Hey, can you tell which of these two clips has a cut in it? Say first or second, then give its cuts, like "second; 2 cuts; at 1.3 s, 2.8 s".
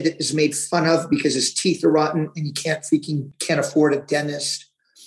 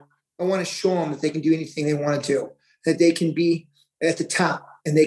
first; 1 cut; at 3.3 s